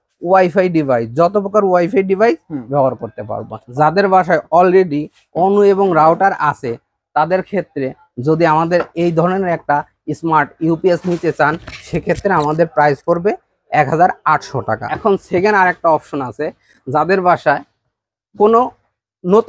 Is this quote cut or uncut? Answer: cut